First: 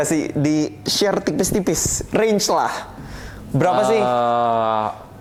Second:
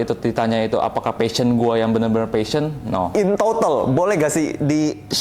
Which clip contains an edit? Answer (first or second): second